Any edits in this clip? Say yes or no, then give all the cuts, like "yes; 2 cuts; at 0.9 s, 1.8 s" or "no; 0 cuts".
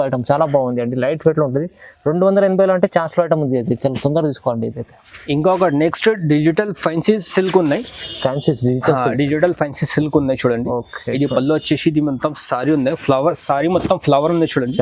no; 0 cuts